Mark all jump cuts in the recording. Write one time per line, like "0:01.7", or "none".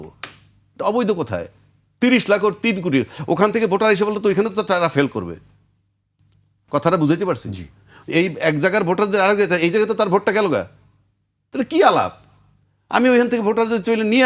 none